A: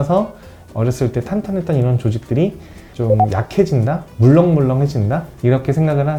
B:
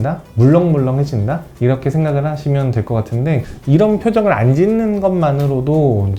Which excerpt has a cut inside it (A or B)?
B